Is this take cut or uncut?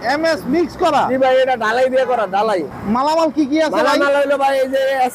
cut